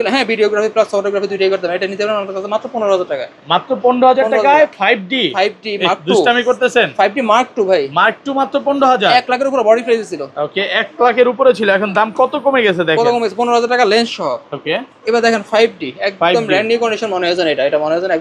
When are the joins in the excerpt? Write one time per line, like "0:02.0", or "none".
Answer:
none